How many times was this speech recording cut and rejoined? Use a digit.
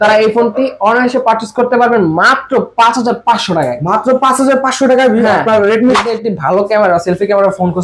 1